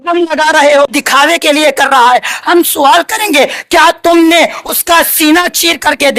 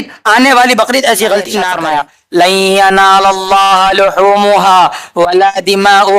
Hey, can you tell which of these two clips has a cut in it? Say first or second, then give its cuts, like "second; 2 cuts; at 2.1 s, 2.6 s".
second; 1 cut; at 1.8 s